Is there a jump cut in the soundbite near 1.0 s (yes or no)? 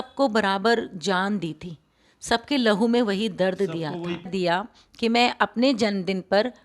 no